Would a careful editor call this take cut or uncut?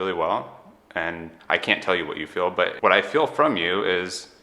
cut